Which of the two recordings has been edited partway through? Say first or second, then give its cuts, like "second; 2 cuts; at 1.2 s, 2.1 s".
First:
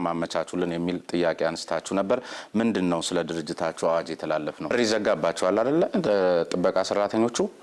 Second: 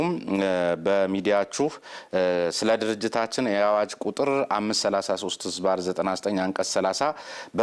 first; 1 cut; at 4.7 s